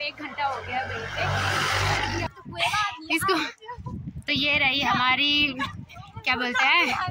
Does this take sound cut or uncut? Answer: cut